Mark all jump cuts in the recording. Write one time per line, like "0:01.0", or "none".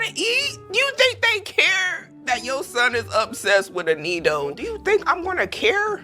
0:04.6